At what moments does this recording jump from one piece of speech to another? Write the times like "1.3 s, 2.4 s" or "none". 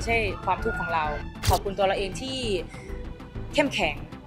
1.5 s